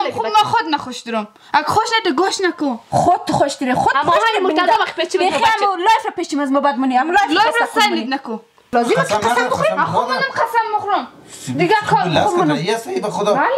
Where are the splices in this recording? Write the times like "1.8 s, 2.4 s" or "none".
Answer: 8.7 s